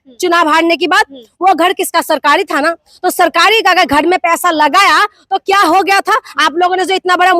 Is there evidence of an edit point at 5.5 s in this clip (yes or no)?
no